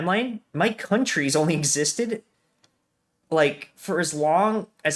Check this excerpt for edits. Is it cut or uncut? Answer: uncut